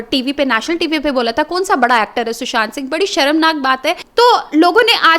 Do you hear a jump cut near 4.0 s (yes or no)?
yes